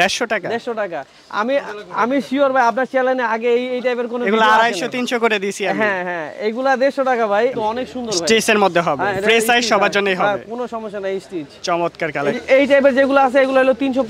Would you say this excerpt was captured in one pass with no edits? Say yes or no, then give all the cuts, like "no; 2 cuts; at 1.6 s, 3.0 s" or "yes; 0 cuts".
no; 2 cuts; at 7.5 s, 12.4 s